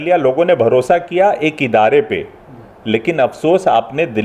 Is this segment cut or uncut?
uncut